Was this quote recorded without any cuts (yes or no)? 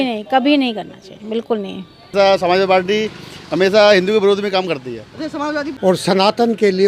no